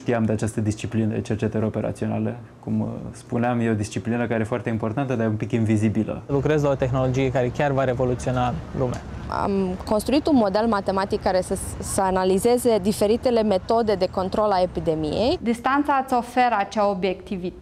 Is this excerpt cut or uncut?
cut